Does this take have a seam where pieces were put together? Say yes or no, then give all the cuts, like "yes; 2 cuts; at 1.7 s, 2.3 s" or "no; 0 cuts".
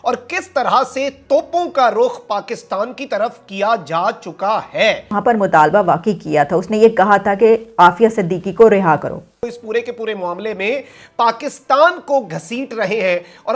yes; 2 cuts; at 5.1 s, 9.6 s